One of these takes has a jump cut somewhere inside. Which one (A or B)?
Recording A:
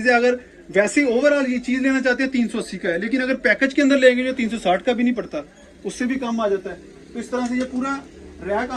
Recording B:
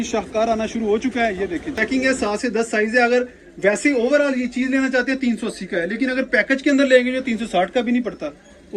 B